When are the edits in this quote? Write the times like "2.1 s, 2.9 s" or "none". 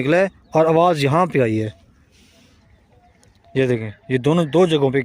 2.6 s